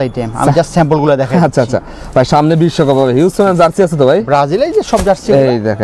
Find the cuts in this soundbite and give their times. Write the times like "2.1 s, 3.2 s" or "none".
none

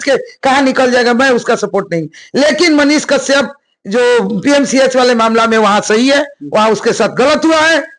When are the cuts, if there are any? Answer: none

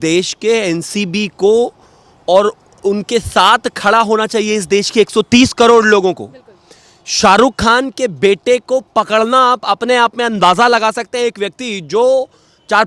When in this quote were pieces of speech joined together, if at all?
none

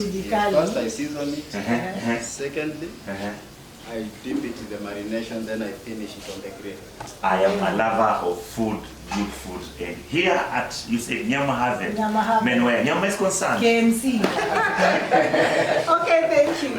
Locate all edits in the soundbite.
14.4 s

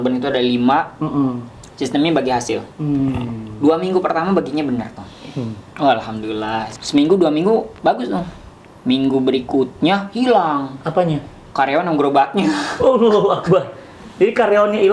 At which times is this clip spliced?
none

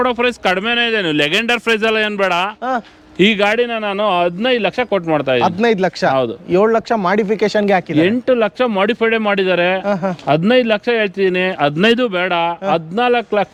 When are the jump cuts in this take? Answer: none

